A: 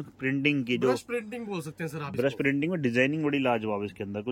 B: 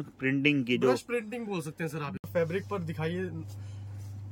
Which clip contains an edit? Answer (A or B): B